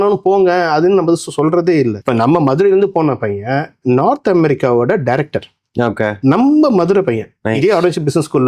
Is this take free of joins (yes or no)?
no